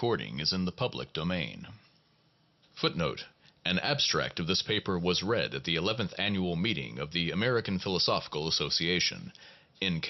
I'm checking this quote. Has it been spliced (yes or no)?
no